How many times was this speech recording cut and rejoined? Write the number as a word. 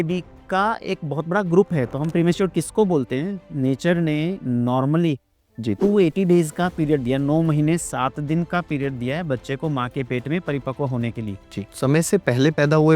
one